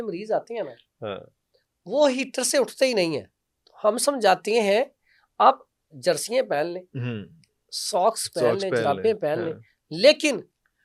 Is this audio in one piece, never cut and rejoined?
yes; 0 cuts

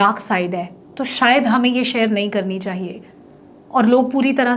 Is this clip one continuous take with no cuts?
yes; 0 cuts

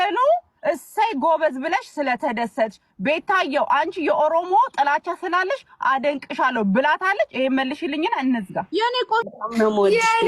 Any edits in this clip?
yes; 1 cut; at 9.3 s

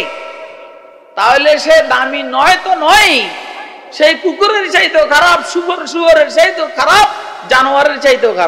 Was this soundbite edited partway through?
no; 0 cuts

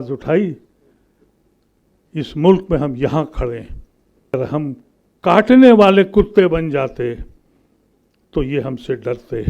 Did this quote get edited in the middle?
yes; 1 cut; at 4.3 s

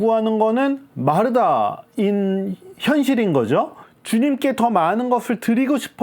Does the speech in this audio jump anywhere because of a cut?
yes; 1 cut; at 3.8 s

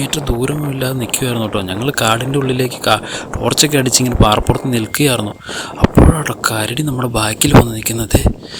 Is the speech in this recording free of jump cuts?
yes; 0 cuts

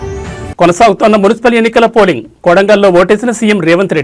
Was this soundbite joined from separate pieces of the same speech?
no; 0 cuts

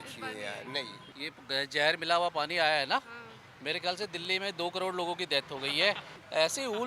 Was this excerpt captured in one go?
yes; 0 cuts

